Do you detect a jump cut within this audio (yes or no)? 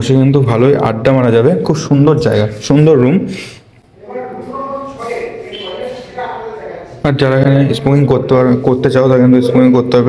no